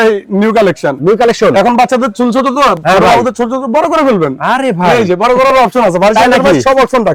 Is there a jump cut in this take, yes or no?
no